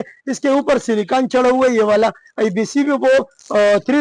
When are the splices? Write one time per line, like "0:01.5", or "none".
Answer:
none